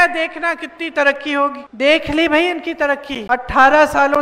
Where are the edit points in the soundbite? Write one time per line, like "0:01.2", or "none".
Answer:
0:01.6
0:03.1